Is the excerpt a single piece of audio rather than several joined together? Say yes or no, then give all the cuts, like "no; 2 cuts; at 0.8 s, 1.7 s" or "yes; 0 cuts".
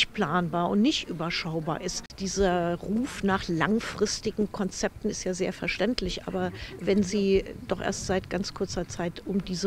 no; 1 cut; at 2.1 s